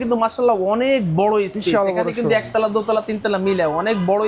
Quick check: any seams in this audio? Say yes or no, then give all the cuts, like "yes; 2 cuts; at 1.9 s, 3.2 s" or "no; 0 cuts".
no; 0 cuts